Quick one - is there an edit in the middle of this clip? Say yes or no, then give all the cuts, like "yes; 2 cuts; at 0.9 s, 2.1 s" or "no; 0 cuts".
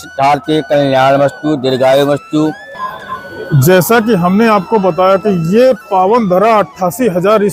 no; 0 cuts